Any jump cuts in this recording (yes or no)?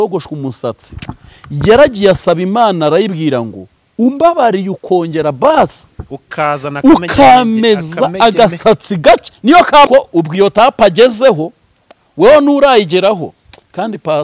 yes